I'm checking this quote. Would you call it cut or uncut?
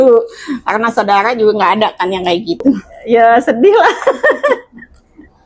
cut